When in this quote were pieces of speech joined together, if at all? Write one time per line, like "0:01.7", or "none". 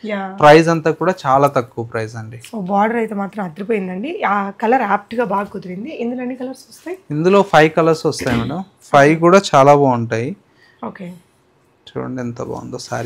none